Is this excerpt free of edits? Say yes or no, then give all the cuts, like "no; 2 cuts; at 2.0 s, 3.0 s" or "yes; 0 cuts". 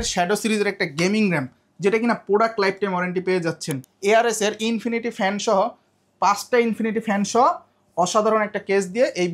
no; 1 cut; at 3.8 s